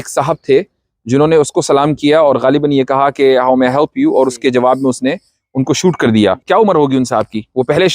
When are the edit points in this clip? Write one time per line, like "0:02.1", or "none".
0:06.4